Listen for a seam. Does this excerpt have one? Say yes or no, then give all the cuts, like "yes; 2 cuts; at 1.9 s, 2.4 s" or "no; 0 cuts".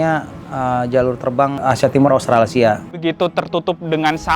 yes; 1 cut; at 2.9 s